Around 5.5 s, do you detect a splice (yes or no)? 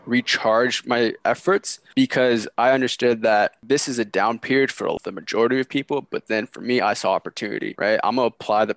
no